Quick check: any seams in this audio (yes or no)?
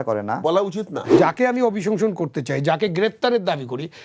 yes